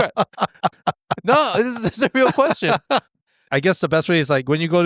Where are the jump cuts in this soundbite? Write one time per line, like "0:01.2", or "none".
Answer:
0:03.4

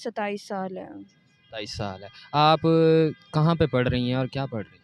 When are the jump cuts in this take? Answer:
none

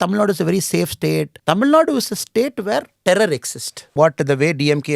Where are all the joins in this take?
0:01.3
0:02.9
0:03.9

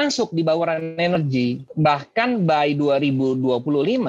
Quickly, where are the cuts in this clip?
0:01.5

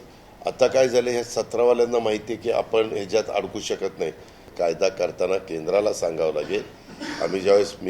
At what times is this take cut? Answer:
0:04.5

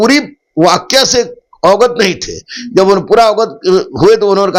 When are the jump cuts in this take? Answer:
none

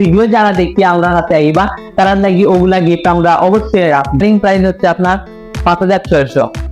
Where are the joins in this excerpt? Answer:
0:04.2

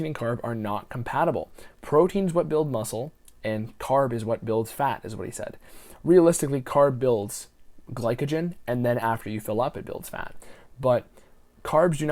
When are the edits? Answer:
none

